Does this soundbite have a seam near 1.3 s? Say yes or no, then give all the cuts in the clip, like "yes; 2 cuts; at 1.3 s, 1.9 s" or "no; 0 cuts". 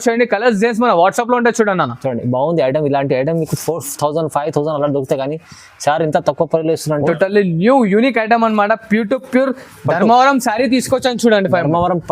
no; 1 cut; at 7.1 s